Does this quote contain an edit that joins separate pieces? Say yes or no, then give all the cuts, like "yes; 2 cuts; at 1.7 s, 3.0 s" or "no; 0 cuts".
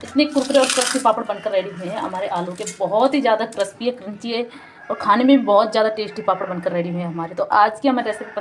no; 0 cuts